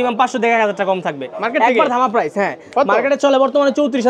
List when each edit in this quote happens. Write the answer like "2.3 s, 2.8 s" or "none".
none

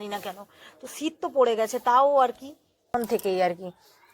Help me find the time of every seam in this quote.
2.9 s

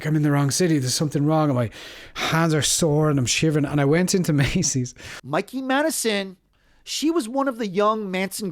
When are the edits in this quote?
5.0 s, 6.4 s

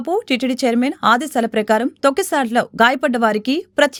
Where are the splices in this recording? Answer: none

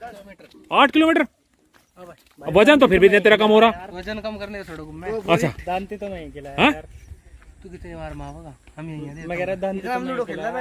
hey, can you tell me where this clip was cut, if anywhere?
none

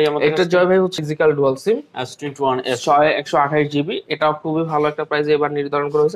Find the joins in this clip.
0.9 s

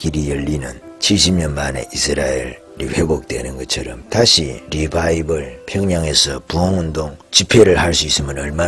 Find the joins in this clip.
3.9 s, 4.6 s

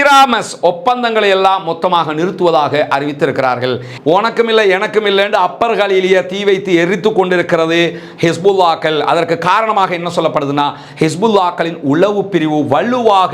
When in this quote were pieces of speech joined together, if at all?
3.9 s

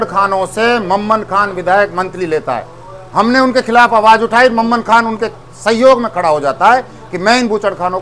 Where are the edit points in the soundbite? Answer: none

